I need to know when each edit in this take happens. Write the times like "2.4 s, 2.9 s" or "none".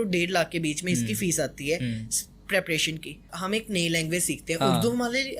3.4 s